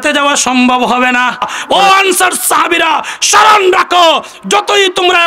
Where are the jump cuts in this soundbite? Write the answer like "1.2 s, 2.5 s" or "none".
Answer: 1.5 s